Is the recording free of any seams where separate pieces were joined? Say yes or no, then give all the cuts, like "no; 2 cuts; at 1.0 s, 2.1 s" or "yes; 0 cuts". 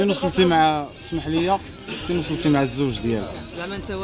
yes; 0 cuts